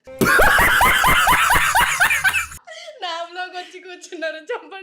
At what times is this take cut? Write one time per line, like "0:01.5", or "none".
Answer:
0:02.5